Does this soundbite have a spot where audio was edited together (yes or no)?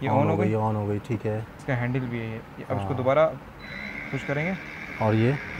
no